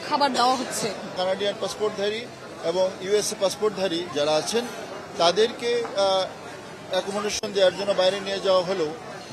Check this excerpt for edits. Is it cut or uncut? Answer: cut